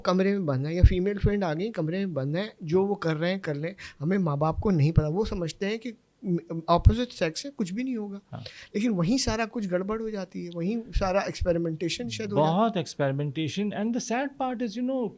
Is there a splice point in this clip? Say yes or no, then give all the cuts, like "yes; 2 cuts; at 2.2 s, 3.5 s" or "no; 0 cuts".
no; 0 cuts